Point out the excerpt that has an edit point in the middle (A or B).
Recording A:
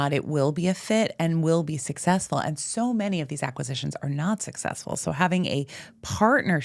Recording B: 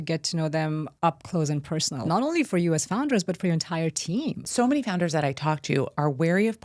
B